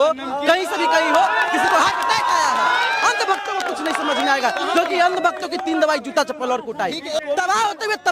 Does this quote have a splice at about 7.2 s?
yes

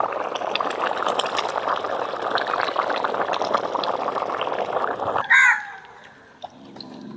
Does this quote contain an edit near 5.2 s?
yes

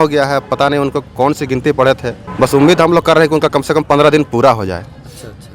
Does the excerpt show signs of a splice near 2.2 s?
yes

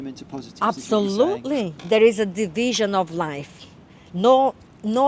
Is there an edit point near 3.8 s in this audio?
no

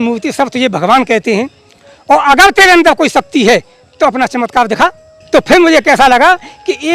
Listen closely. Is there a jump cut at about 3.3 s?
no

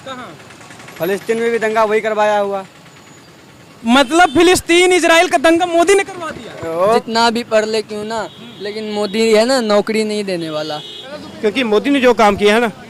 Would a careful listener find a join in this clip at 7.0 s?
yes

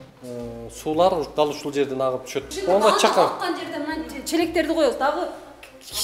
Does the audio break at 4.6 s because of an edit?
no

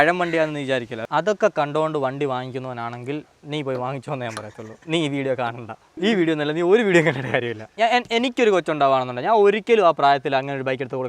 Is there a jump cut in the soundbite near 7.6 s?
yes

